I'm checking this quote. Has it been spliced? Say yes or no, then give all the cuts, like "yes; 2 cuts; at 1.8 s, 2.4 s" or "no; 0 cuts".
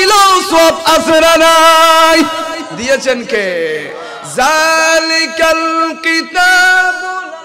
no; 0 cuts